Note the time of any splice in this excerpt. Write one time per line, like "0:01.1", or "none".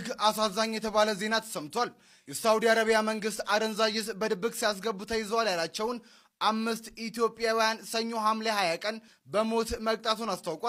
none